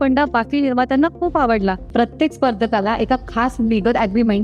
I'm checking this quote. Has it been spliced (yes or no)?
yes